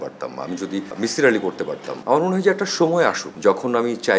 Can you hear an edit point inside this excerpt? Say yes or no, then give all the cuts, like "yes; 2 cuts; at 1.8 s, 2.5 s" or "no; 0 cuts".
yes; 3 cuts; at 0.9 s, 1.9 s, 3.3 s